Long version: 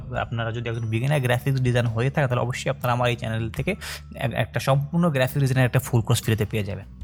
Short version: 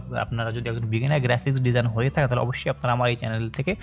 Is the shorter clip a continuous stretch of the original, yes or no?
yes